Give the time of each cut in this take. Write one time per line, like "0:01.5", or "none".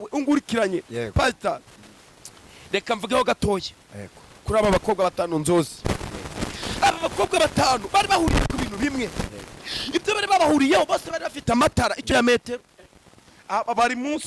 0:12.0